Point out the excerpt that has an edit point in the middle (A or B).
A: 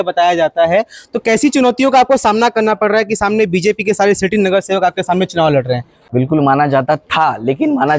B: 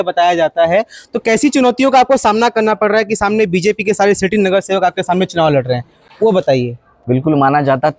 A